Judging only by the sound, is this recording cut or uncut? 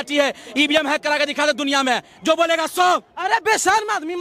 uncut